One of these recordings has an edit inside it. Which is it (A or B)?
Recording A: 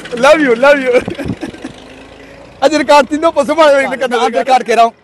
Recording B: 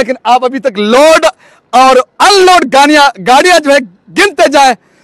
A